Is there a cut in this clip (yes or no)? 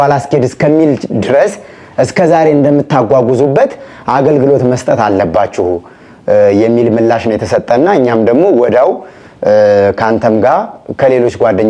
no